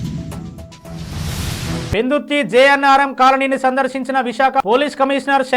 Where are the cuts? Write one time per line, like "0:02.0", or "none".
0:01.9